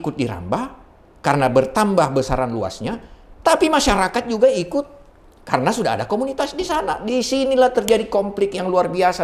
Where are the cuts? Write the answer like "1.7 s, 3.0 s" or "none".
none